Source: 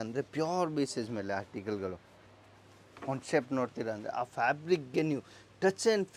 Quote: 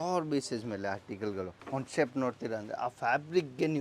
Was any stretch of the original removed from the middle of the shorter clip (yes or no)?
yes